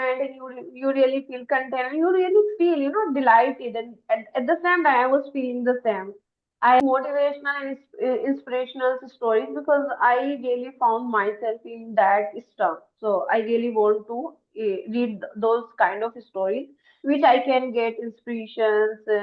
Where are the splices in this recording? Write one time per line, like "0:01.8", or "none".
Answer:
0:06.8